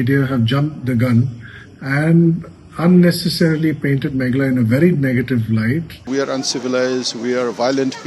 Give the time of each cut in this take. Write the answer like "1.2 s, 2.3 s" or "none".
6.0 s